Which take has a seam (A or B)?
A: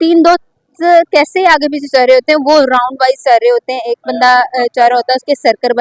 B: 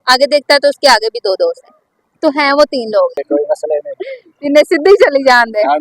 B